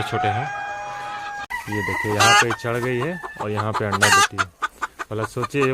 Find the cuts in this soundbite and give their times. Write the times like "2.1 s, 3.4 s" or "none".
1.5 s